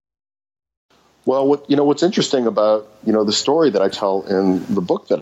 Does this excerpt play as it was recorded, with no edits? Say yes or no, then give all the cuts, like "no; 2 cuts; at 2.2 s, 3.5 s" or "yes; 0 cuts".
no; 1 cut; at 1.1 s